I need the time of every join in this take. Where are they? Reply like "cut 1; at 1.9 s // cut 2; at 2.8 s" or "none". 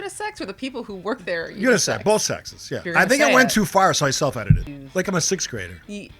cut 1; at 2.8 s // cut 2; at 4.8 s